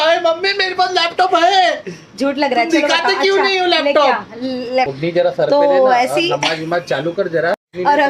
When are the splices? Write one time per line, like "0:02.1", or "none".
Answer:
0:04.9